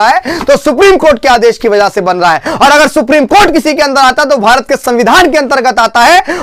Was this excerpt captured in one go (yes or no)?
yes